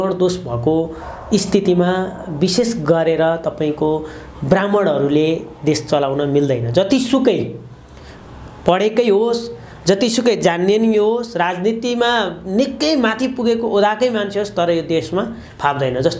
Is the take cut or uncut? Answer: uncut